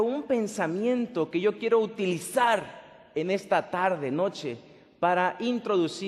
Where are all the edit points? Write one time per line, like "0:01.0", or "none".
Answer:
none